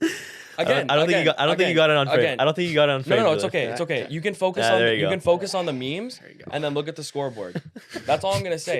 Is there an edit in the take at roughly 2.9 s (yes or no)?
no